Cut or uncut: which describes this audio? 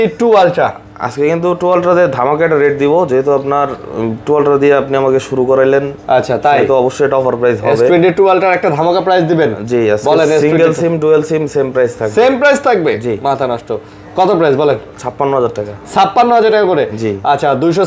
uncut